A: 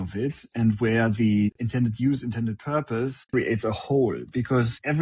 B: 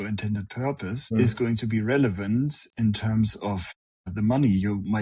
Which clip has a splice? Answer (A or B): A